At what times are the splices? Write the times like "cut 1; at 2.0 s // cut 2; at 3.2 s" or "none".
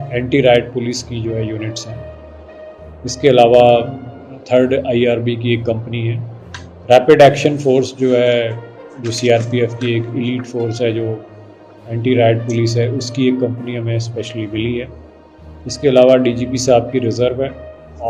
none